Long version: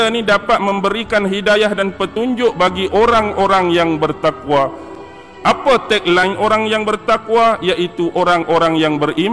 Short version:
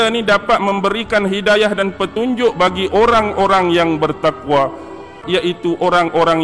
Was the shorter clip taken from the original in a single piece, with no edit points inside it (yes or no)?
no